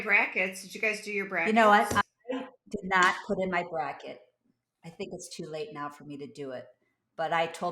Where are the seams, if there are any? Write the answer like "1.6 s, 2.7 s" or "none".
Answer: 1.4 s